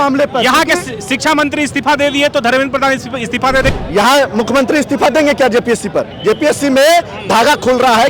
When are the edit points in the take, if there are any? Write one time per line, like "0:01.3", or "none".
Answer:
0:03.7